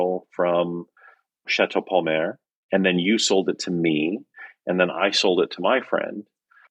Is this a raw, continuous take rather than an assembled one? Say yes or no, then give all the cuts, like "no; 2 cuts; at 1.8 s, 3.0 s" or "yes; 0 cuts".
no; 2 cuts; at 1.5 s, 2.5 s